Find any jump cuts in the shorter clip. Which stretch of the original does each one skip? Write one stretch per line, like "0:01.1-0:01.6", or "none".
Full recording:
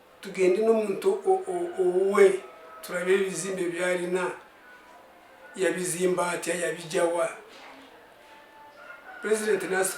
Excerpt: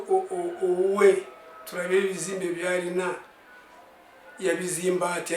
none